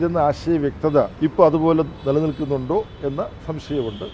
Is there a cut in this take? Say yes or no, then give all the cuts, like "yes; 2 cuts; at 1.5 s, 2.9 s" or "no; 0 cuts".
yes; 1 cut; at 1.1 s